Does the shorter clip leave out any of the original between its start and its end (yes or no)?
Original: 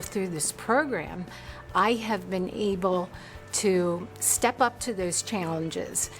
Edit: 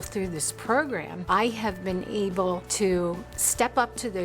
yes